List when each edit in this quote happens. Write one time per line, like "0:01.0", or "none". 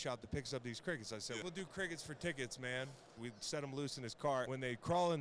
0:01.4
0:03.2
0:04.5